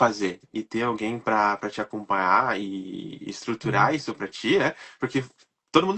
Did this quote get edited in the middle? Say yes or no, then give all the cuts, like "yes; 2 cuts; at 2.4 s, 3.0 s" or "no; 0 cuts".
no; 0 cuts